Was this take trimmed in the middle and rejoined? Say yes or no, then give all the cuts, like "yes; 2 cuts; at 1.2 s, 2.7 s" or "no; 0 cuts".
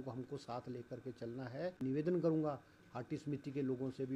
yes; 1 cut; at 1.8 s